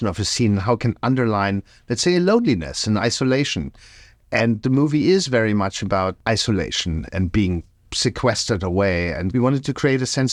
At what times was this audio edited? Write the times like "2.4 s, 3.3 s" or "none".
none